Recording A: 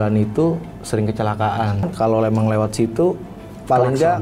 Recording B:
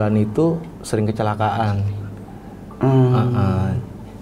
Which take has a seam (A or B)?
A